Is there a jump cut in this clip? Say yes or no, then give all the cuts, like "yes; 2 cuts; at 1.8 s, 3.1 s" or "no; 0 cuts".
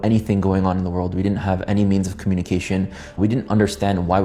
no; 0 cuts